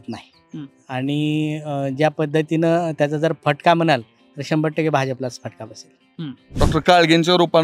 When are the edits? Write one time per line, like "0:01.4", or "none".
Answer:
0:06.5